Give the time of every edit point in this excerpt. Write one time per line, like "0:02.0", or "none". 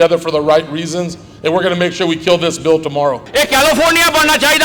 0:03.2

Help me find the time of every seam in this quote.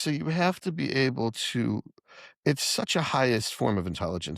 none

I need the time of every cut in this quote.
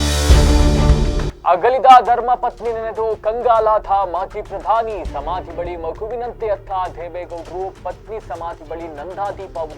0:01.3

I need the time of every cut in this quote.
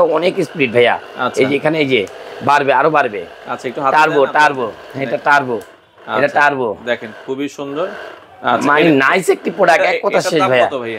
none

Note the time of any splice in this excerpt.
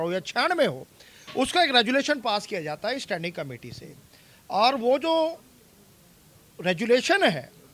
none

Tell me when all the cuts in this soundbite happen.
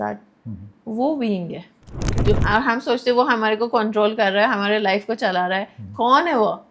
0:02.2

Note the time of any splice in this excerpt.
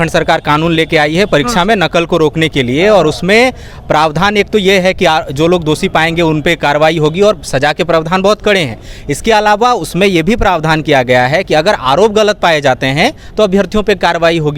none

